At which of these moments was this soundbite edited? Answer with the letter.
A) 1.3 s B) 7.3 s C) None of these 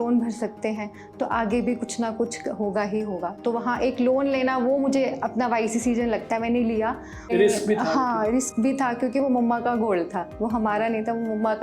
B